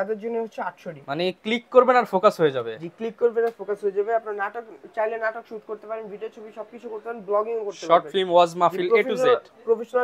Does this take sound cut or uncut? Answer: uncut